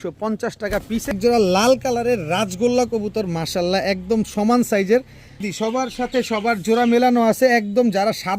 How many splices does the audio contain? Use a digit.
2